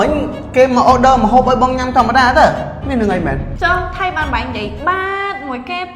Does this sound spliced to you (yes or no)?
yes